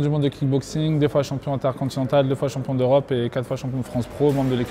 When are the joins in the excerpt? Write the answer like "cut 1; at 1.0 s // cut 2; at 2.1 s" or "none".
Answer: none